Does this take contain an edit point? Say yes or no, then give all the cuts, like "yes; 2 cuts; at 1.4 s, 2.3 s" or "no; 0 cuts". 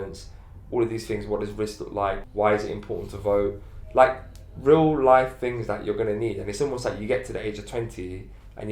yes; 1 cut; at 2.2 s